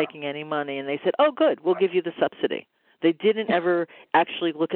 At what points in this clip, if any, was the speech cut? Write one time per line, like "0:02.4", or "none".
none